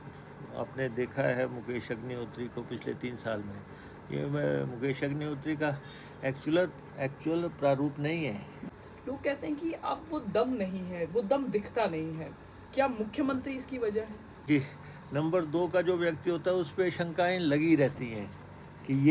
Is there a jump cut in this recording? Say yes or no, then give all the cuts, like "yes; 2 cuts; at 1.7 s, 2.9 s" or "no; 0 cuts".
yes; 2 cuts; at 8.8 s, 14.5 s